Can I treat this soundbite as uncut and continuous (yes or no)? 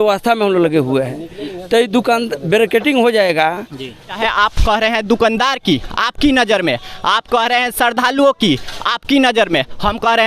no